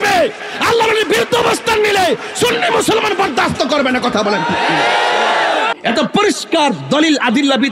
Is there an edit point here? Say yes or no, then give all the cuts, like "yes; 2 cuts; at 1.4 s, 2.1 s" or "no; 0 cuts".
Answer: yes; 1 cut; at 5.7 s